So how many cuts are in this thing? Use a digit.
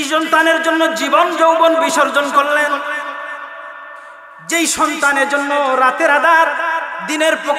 0